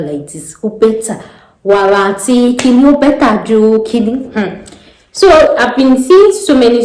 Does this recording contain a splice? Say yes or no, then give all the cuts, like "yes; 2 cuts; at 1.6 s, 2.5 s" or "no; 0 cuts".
no; 0 cuts